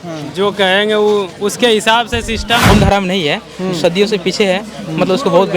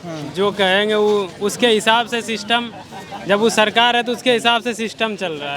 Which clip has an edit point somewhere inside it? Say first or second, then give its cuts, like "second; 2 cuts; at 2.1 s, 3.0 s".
first; 1 cut; at 2.7 s